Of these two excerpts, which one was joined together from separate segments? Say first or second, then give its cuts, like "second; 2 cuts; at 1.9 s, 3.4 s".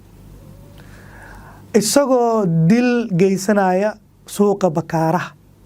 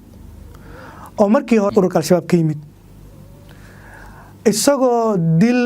second; 1 cut; at 1.7 s